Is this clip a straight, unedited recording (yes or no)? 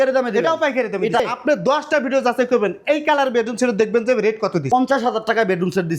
no